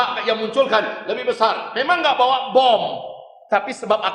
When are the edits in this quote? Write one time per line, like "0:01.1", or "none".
none